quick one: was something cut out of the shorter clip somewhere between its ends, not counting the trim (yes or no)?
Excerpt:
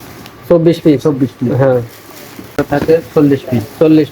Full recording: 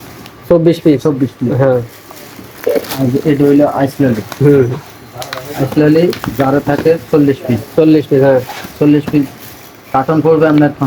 yes